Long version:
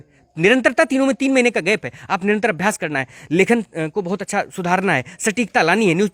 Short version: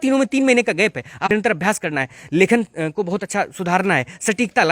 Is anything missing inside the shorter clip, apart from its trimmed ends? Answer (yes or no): yes